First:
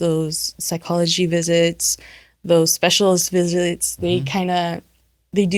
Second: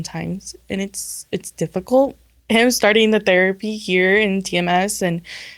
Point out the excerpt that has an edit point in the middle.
second; 1 cut; at 2.4 s

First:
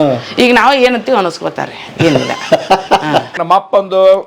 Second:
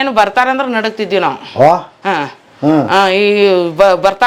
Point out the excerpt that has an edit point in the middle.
first; 1 cut; at 3.3 s

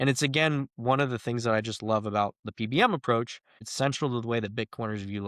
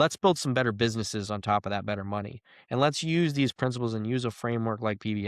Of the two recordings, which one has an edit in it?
first; 1 cut; at 3.6 s

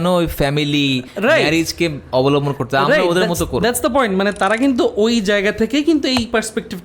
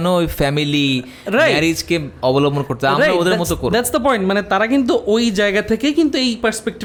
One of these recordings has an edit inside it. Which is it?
first; 1 cut; at 1.1 s

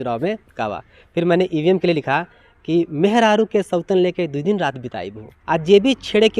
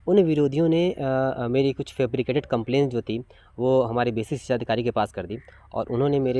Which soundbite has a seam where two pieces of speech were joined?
first; 1 cut; at 5.4 s

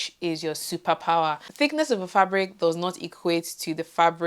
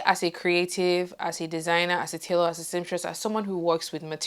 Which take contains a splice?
first; 1 cut; at 1.5 s

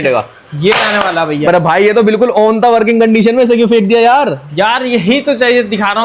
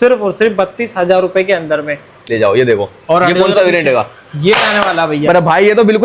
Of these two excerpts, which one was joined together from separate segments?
second; 1 cut; at 2.3 s

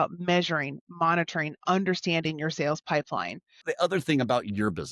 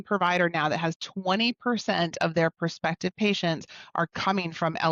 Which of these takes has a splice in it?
first; 1 cut; at 3.6 s

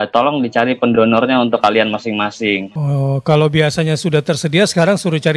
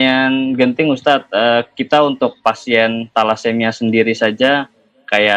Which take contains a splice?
first; 1 cut; at 2.7 s

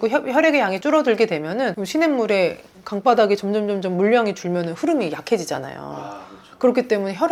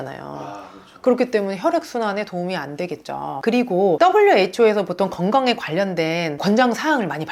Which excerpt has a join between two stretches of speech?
second; 1 cut; at 3.3 s

